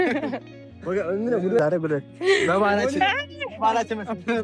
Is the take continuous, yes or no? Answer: no